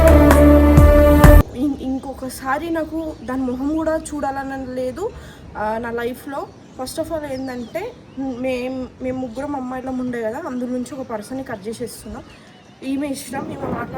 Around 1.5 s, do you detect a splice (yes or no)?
yes